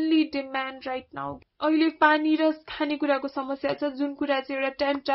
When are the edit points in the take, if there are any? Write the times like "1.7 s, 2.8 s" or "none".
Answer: 1.4 s

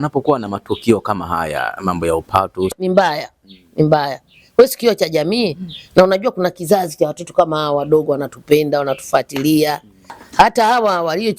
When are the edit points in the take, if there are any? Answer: 2.7 s

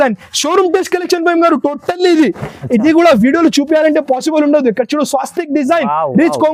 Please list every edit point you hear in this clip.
none

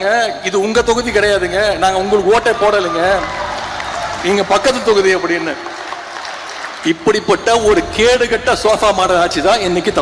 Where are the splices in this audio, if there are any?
none

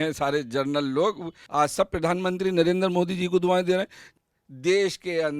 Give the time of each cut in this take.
1.3 s, 4.1 s

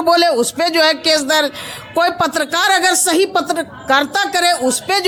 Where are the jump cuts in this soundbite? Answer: none

